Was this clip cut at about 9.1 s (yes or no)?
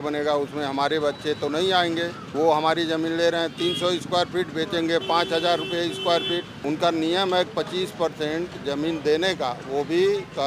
no